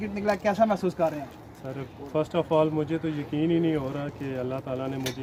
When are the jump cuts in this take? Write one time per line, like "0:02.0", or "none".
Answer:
none